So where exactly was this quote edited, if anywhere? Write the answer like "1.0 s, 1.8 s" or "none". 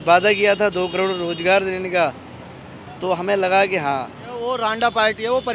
4.5 s